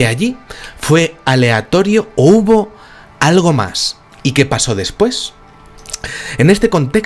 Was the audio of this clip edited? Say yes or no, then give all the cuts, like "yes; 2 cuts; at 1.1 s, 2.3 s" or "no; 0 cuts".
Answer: yes; 1 cut; at 5.4 s